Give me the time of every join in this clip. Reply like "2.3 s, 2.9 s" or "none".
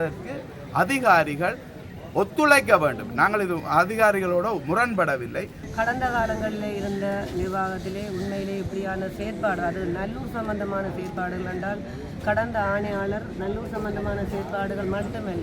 5.6 s